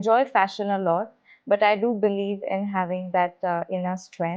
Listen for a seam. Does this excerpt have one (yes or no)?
no